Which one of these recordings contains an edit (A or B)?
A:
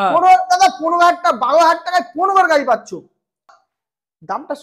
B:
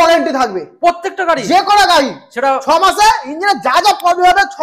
A